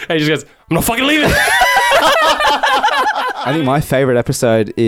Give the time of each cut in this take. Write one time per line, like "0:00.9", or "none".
0:03.3